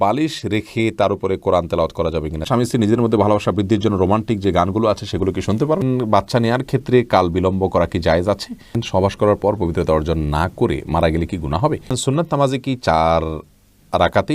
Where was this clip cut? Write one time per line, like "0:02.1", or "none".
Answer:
0:02.4
0:05.8
0:08.8
0:11.9